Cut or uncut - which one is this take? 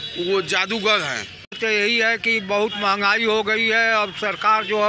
cut